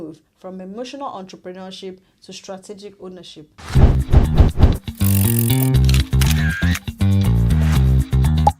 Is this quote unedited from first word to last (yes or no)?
no